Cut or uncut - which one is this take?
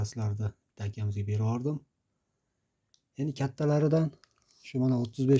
uncut